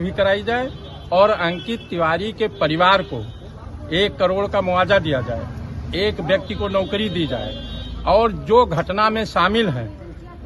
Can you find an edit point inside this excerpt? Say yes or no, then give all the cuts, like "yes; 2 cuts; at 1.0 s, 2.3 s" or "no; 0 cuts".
no; 0 cuts